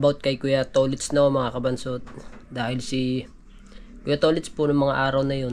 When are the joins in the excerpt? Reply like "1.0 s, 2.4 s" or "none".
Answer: none